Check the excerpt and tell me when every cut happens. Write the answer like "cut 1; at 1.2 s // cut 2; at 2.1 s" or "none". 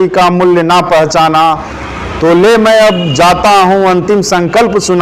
none